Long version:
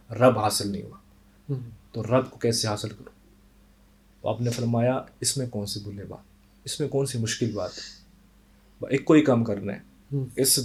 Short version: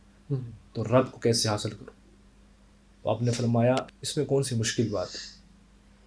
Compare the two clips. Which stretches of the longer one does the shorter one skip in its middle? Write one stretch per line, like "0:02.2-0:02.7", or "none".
0:05.2-0:06.6